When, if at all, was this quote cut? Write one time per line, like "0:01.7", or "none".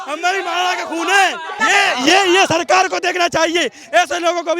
0:01.6

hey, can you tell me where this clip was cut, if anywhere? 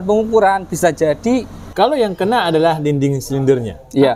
0:01.7

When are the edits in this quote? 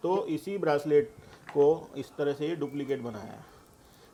none

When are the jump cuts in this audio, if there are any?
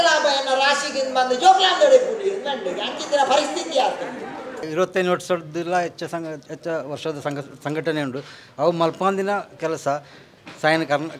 0:04.7

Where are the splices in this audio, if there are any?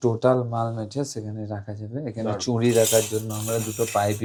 none

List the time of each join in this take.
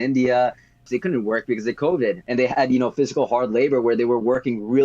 0:00.8
0:02.2

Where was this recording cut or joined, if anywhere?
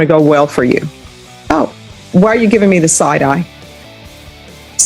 0:01.3

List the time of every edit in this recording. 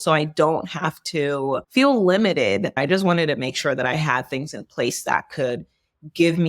0:02.7

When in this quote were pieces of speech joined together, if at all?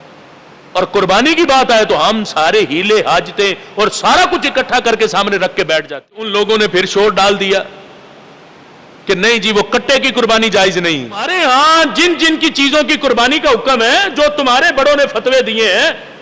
0:06.3
0:11.3

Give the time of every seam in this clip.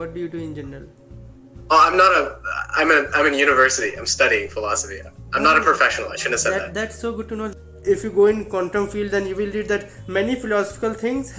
0:07.5

